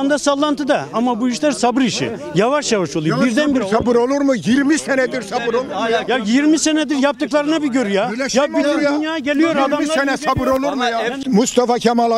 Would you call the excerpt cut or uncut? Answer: uncut